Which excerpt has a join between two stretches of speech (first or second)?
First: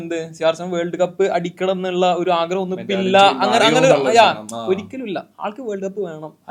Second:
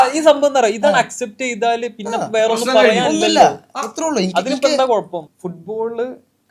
second